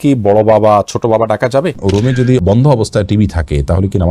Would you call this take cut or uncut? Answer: cut